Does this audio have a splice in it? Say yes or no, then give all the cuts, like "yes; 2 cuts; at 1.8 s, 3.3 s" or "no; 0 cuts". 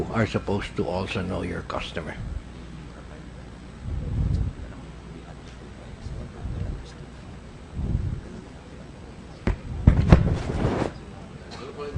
no; 0 cuts